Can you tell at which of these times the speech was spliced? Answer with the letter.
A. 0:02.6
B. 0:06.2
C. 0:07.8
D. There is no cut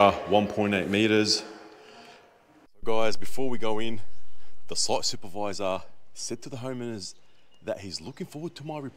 A